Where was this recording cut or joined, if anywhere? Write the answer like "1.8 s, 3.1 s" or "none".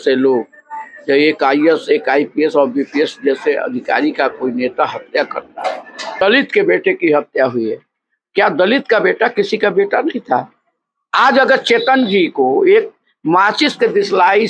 6.2 s